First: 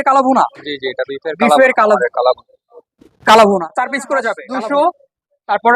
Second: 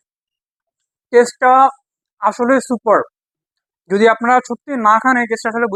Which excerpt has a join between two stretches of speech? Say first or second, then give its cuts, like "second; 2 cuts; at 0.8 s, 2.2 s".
first; 2 cuts; at 2.0 s, 4.4 s